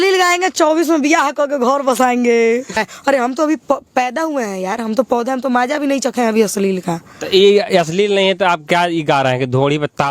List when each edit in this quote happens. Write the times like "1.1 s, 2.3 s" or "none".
2.8 s